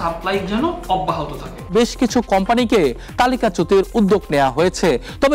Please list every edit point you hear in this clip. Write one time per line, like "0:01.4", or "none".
0:01.7